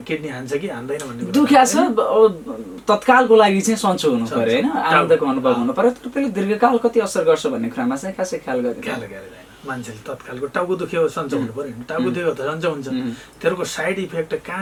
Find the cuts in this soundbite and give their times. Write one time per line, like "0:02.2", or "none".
none